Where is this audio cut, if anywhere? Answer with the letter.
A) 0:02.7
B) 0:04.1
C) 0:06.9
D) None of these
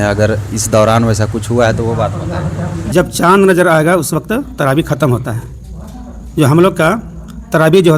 A